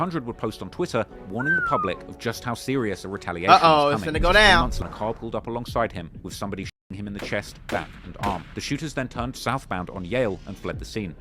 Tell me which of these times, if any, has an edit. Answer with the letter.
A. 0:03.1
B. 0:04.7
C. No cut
B